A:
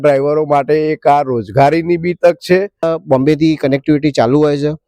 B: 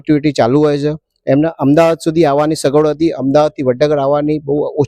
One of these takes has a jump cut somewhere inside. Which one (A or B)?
A